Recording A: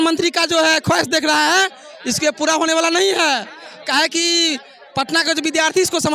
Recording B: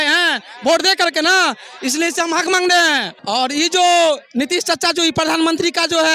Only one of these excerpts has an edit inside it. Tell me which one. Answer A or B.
B